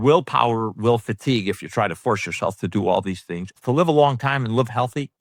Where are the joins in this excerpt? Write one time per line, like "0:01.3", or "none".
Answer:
none